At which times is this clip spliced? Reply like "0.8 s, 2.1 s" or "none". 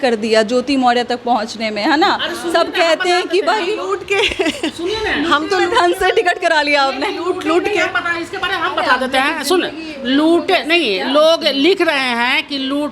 none